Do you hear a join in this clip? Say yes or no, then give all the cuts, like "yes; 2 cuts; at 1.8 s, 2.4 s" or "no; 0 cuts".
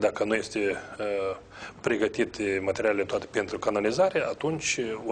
no; 0 cuts